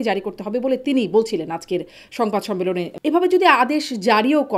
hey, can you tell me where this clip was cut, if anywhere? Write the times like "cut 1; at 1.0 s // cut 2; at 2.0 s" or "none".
cut 1; at 2.9 s